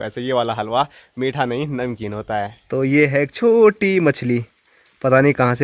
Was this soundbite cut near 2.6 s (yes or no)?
yes